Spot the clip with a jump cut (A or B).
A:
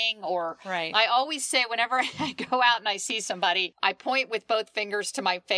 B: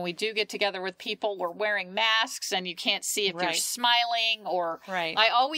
A